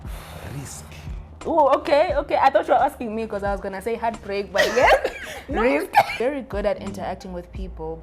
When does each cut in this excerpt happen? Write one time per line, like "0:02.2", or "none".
0:06.1